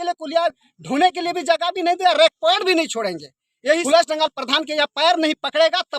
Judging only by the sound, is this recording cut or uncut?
cut